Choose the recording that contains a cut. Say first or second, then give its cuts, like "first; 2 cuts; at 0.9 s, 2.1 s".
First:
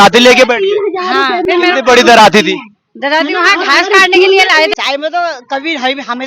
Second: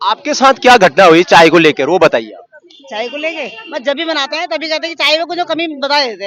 first; 2 cuts; at 1.4 s, 4.7 s